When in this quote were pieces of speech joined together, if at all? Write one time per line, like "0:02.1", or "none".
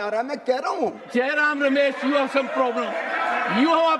0:01.0